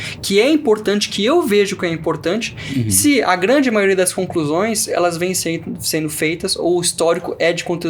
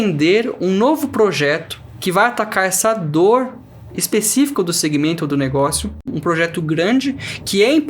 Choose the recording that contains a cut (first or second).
second